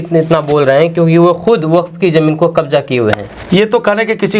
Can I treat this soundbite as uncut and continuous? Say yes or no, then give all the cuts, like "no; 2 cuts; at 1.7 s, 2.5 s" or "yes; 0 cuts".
yes; 0 cuts